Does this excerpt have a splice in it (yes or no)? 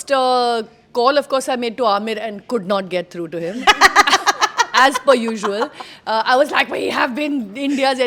no